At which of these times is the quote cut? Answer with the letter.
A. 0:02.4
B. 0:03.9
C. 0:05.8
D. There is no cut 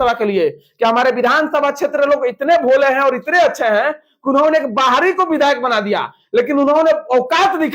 D